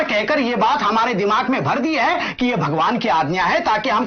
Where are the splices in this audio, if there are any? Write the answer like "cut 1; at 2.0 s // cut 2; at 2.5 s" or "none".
none